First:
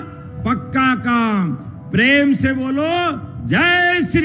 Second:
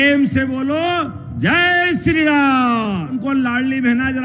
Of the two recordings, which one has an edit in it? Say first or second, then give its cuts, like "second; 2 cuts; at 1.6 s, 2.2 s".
second; 1 cut; at 3.1 s